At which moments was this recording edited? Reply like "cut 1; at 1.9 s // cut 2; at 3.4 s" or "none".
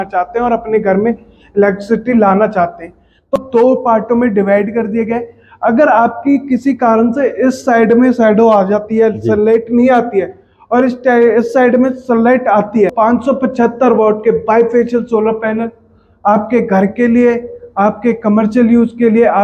cut 1; at 3.3 s // cut 2; at 12.9 s